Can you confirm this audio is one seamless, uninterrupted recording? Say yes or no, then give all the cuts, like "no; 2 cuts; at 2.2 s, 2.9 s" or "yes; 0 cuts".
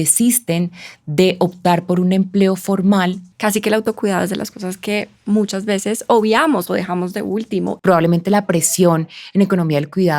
no; 2 cuts; at 3.3 s, 7.7 s